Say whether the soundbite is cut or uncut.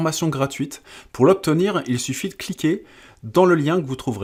uncut